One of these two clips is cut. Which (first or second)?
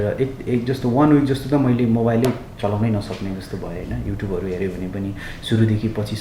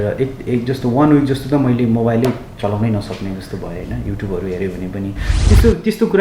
second